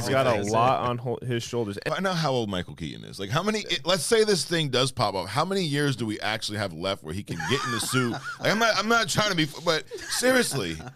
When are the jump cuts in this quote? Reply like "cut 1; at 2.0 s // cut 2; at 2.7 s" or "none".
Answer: cut 1; at 1.8 s